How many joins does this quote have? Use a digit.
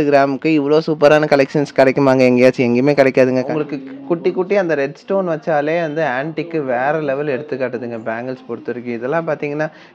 1